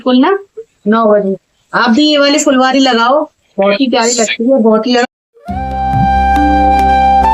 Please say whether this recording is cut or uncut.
cut